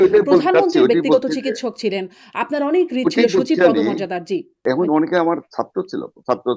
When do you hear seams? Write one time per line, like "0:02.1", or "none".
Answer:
0:04.6

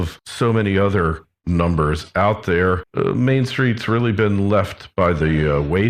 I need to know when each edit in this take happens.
none

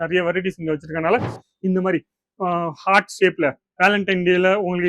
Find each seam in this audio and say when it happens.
0:01.4

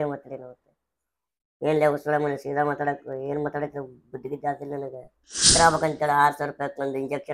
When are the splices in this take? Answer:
0:05.5

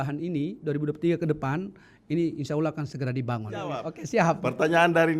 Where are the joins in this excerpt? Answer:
0:03.9

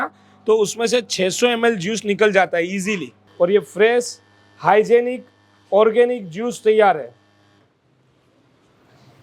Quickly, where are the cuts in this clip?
0:03.2

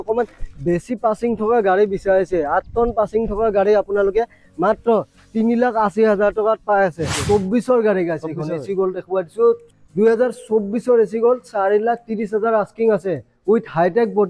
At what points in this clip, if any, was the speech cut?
0:07.2
0:09.7

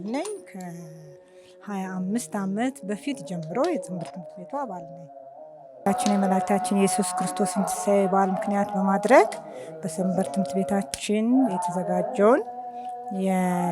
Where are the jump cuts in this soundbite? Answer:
0:05.8

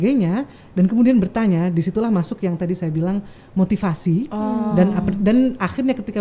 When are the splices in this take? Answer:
none

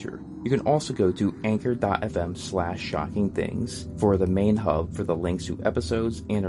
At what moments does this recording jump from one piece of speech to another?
0:03.8

